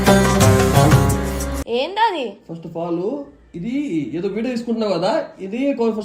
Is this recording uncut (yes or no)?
yes